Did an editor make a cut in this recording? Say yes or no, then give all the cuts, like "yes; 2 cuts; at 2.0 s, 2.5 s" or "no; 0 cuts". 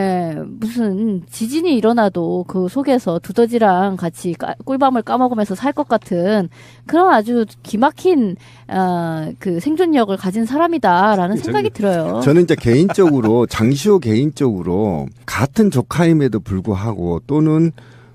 no; 0 cuts